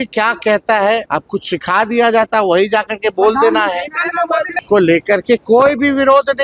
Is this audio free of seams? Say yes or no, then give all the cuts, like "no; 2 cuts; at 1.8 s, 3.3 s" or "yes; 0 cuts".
no; 2 cuts; at 1.1 s, 4.5 s